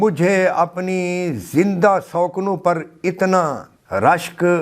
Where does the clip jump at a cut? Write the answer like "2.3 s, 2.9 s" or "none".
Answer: 3.7 s